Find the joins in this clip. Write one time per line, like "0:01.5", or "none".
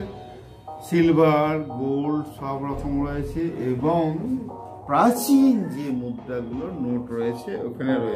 none